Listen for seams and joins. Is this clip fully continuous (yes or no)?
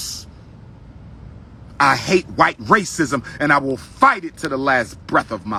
yes